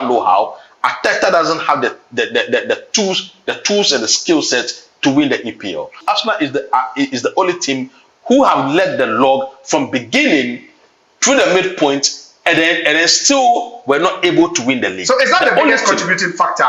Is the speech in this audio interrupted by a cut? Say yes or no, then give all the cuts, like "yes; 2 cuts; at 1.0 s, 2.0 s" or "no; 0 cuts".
yes; 1 cut; at 6.0 s